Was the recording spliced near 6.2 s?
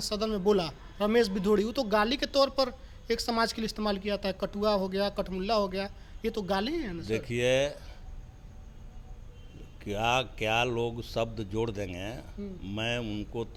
no; 0 cuts

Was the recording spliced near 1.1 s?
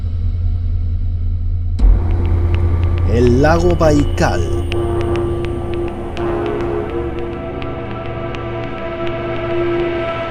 no; 0 cuts

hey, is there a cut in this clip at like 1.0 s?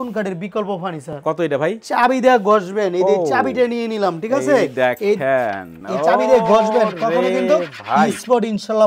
no; 0 cuts

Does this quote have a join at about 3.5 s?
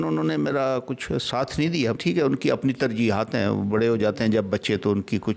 no; 1 cut; at 2.0 s

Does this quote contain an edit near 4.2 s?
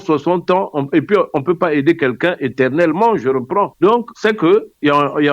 yes; 1 cut; at 4.2 s

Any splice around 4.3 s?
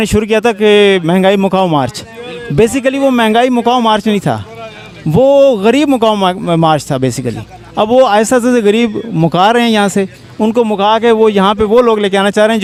no; 0 cuts

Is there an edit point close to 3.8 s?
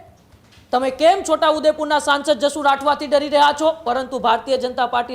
yes; 1 cut; at 3.8 s

